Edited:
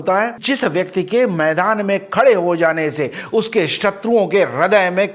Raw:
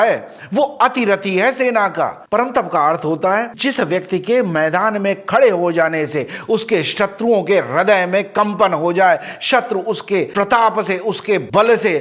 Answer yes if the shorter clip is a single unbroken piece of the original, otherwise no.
yes